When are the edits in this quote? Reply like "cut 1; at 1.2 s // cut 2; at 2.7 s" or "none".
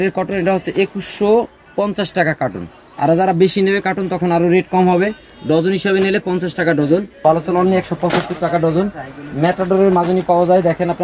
cut 1; at 7.1 s